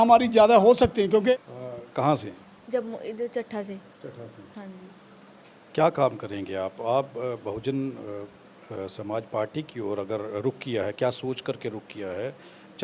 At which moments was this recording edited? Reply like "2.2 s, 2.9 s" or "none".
1.3 s